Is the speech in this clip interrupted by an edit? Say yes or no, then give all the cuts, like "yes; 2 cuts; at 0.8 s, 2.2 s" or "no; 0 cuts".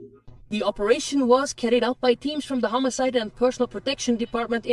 no; 0 cuts